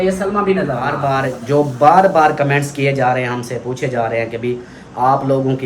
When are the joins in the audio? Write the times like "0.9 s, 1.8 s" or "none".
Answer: 1.0 s